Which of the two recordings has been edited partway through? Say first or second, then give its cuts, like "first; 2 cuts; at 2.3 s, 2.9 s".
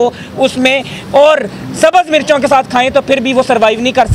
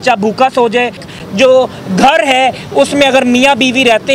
second; 1 cut; at 1.0 s